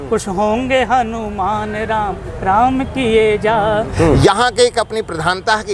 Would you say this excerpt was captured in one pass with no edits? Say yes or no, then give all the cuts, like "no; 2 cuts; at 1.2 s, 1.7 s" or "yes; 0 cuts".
no; 1 cut; at 3.9 s